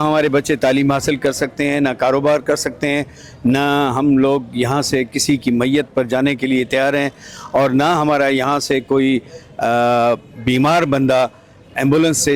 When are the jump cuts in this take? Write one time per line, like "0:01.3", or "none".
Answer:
none